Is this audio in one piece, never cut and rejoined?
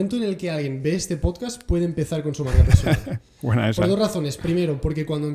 yes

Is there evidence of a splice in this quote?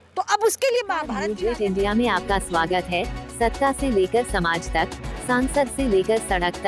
yes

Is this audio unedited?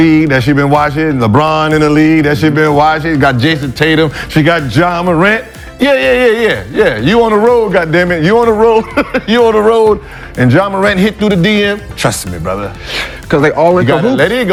yes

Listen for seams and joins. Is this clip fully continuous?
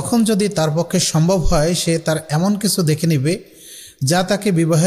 yes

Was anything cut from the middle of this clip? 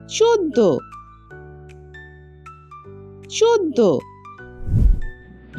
no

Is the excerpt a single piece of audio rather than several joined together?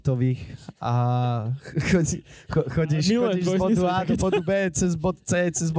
yes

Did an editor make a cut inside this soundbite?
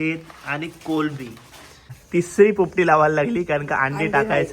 yes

